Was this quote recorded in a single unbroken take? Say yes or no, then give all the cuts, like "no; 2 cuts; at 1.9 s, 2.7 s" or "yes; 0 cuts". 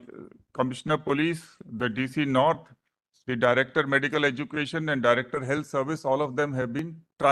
yes; 0 cuts